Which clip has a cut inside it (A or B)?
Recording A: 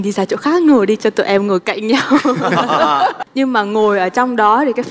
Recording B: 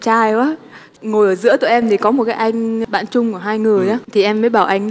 A